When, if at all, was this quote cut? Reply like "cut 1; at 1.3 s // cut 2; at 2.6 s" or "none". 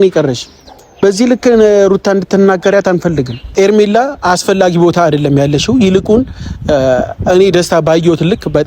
cut 1; at 3.4 s